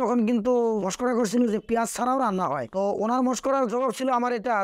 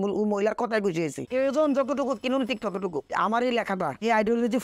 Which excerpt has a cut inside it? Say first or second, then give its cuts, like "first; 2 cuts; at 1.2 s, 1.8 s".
second; 2 cuts; at 1.2 s, 3.1 s